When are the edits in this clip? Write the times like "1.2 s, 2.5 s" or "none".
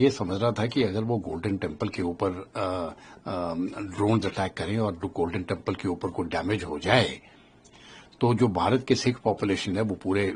none